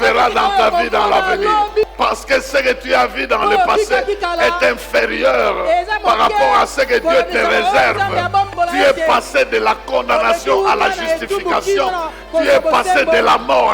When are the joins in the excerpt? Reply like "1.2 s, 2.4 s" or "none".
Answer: 1.9 s, 8.5 s